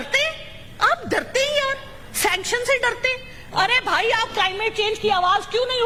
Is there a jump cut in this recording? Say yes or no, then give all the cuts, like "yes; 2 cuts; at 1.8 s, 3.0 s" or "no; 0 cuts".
no; 0 cuts